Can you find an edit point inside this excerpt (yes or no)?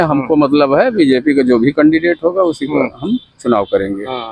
no